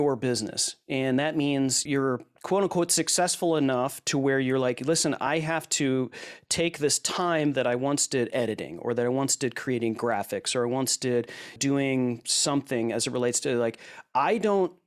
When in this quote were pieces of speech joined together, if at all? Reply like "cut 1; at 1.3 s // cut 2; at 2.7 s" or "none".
cut 1; at 1.8 s // cut 2; at 11.6 s